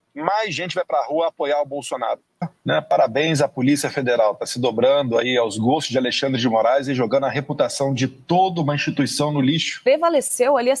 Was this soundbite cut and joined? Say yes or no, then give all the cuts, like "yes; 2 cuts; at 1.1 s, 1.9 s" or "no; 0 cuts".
yes; 2 cuts; at 2.6 s, 9.9 s